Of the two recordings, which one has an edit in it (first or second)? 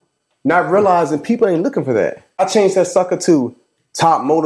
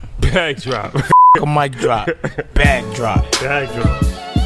first